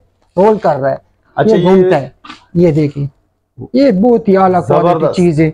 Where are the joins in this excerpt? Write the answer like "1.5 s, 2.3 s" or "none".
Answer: none